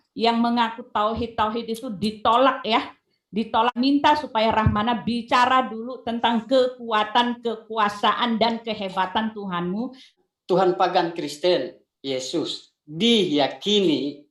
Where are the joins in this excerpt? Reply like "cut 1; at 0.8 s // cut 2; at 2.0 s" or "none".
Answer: cut 1; at 3.8 s // cut 2; at 10.1 s